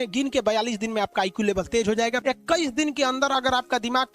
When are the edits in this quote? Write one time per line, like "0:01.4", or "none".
0:02.2